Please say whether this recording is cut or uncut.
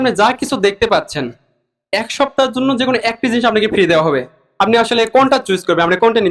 uncut